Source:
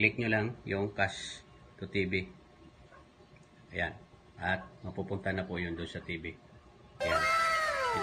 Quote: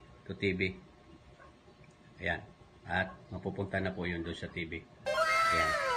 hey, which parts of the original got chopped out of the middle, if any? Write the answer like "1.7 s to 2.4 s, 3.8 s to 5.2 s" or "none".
6.4 s to 6.8 s